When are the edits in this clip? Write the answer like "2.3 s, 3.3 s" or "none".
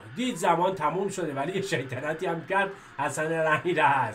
none